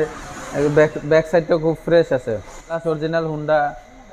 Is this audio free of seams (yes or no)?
no